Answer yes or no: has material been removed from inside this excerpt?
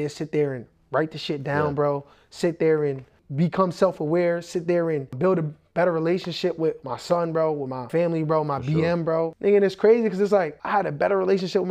yes